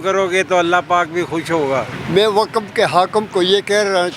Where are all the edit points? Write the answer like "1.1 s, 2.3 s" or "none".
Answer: 2.0 s